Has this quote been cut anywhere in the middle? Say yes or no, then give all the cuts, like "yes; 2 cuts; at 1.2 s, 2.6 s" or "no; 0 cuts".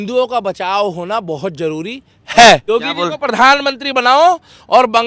yes; 1 cut; at 2.6 s